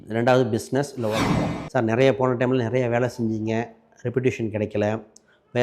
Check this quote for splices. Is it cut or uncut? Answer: cut